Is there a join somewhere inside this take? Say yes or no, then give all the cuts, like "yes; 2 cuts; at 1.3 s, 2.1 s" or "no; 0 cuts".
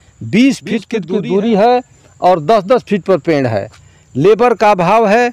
yes; 1 cut; at 0.9 s